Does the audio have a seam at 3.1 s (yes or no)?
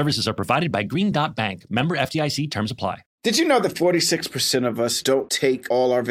yes